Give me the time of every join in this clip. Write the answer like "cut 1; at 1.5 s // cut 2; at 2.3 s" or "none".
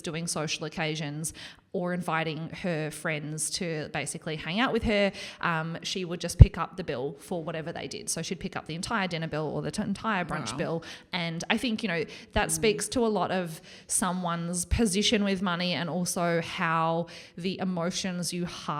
none